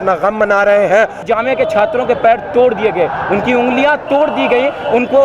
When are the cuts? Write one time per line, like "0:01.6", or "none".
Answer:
0:01.2